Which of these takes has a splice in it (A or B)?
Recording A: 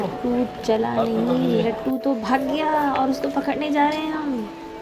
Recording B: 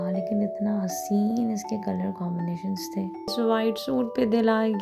B